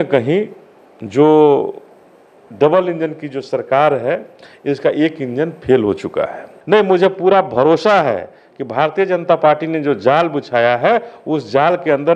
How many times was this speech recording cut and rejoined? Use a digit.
1